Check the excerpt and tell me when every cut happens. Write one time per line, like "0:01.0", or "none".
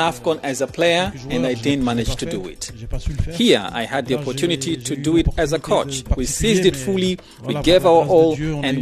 0:06.0